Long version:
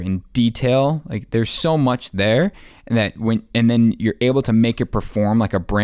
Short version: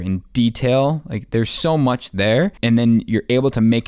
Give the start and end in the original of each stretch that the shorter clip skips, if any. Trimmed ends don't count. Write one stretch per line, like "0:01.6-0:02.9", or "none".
0:02.6-0:03.5